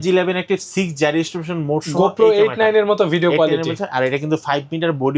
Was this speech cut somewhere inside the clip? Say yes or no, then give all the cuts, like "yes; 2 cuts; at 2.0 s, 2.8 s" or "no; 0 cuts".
no; 0 cuts